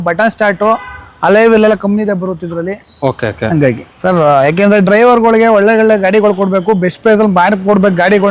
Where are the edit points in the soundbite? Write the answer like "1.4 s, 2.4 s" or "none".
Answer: 3.9 s